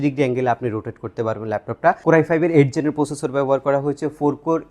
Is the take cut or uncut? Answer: cut